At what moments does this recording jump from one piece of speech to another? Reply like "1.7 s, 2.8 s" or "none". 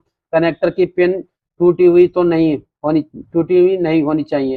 none